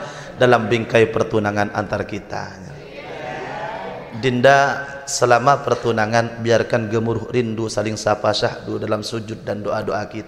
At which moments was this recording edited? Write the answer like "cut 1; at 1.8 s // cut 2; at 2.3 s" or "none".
none